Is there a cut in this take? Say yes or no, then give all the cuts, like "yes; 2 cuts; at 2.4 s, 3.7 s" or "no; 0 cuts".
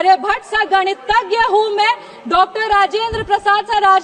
no; 0 cuts